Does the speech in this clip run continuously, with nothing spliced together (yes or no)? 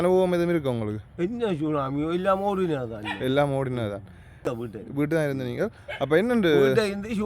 no